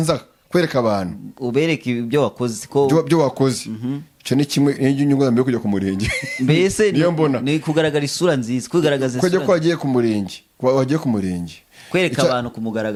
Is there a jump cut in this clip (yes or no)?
no